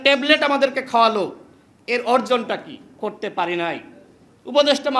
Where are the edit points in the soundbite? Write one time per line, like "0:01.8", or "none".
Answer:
0:02.9